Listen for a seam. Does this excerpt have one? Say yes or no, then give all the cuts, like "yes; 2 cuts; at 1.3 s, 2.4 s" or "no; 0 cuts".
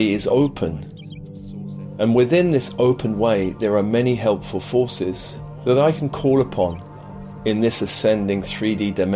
no; 0 cuts